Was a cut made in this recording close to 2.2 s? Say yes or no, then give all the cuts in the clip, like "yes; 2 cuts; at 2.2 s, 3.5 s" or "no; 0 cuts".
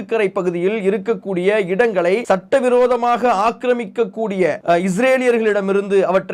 yes; 2 cuts; at 2.2 s, 4.6 s